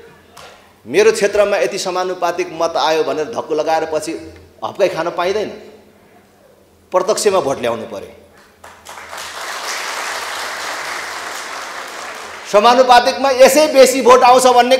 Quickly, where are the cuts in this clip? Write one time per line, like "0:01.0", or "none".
none